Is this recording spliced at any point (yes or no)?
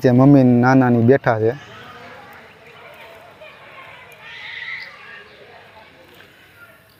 no